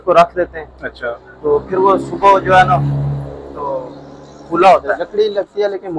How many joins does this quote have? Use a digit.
1